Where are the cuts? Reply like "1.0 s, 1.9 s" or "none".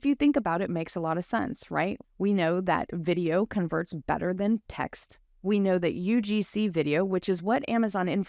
2.0 s